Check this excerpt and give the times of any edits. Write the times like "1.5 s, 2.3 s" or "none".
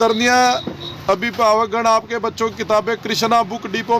none